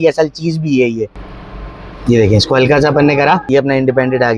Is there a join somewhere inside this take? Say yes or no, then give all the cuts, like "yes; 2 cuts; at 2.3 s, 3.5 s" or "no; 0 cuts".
yes; 2 cuts; at 1.2 s, 3.4 s